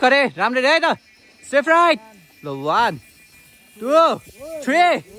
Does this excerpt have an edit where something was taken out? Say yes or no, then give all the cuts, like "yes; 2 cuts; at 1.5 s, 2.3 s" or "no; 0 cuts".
no; 0 cuts